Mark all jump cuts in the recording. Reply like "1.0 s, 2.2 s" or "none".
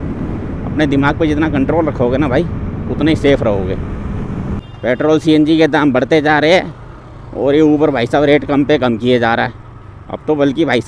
4.7 s